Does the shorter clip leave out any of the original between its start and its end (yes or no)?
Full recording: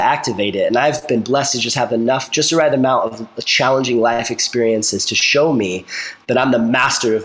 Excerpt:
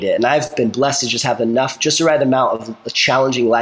no